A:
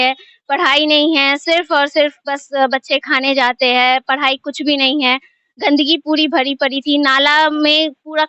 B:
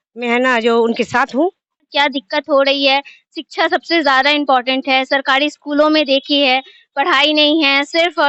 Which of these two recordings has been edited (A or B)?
B